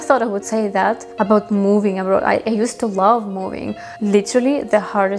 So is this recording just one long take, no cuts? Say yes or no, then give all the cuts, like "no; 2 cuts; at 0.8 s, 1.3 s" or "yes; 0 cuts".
no; 2 cuts; at 1.1 s, 3.9 s